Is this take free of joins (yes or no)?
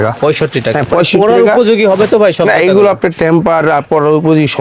yes